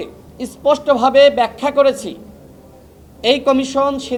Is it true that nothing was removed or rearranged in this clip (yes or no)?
yes